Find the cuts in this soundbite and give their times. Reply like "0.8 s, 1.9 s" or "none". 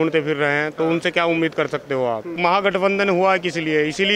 2.3 s